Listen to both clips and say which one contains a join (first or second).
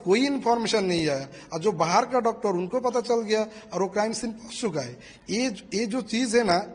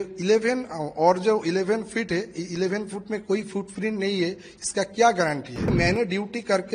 second